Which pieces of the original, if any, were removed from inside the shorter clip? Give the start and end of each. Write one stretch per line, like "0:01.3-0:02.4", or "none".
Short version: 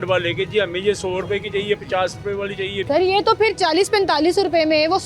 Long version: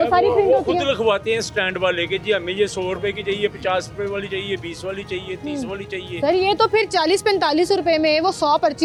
0:04.6-0:06.2